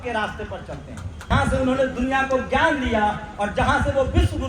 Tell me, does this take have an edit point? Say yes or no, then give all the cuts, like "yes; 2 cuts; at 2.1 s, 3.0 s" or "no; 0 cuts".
yes; 1 cut; at 1.3 s